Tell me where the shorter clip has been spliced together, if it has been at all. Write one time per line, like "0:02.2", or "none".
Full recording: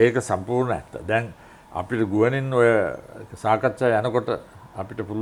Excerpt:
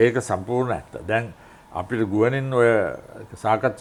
none